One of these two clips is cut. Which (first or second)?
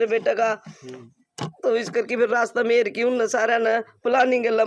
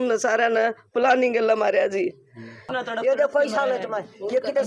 second